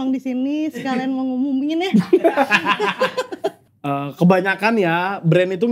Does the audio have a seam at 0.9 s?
no; 1 cut; at 3.7 s

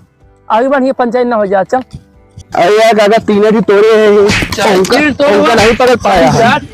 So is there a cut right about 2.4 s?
yes; 1 cut; at 2.4 s

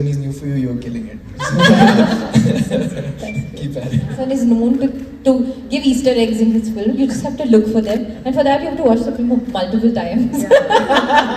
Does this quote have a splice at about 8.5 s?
no; 1 cut; at 4.2 s

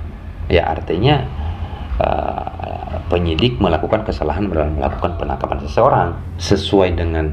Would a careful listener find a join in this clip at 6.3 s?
yes; 1 cut; at 6.3 s

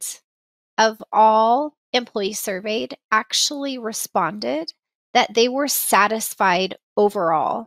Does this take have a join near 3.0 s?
no; 1 cut; at 1.8 s

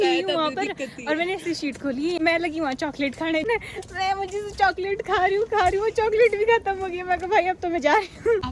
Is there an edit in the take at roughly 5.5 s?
no; 2 cuts; at 2.2 s, 3.5 s

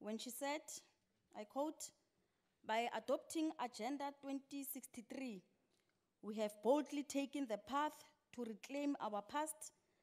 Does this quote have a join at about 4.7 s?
yes; 1 cut; at 4.7 s

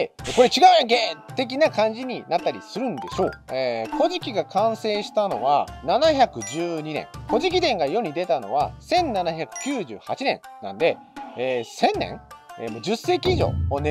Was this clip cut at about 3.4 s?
yes; 1 cut; at 3.4 s

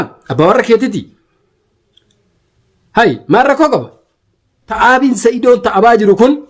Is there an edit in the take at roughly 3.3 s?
no; 1 cut; at 4.7 s

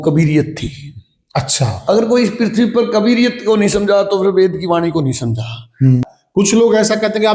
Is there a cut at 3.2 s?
no; 1 cut; at 6.0 s

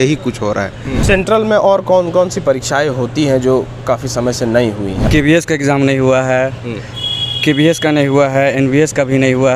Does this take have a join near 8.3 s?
no; 2 cuts; at 1.0 s, 5.0 s

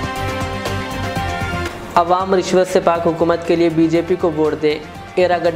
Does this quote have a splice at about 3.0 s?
no; 1 cut; at 1.7 s

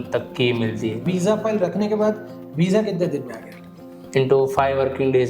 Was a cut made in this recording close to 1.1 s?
yes; 1 cut; at 1.1 s

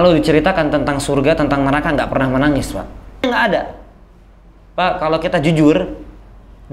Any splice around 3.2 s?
yes; 1 cut; at 3.2 s

